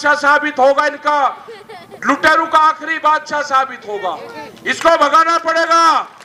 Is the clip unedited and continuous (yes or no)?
yes